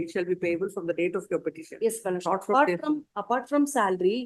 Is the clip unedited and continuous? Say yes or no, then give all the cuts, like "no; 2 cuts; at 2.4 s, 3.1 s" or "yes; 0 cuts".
yes; 0 cuts